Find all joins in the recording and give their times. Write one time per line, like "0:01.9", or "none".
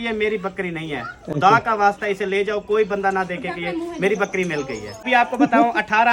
0:05.0